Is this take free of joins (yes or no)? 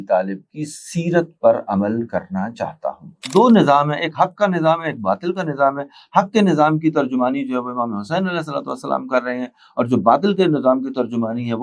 no